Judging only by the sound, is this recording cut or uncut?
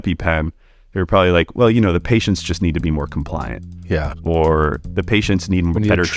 cut